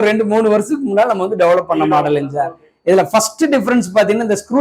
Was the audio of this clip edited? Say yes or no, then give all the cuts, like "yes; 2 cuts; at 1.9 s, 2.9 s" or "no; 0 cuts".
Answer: no; 0 cuts